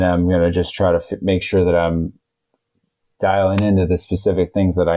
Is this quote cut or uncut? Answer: uncut